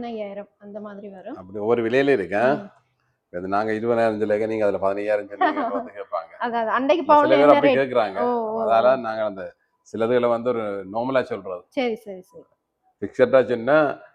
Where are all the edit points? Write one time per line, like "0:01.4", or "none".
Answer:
none